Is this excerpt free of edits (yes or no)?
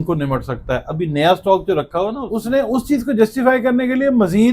no